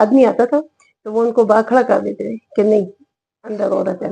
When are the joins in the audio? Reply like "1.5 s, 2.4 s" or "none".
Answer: none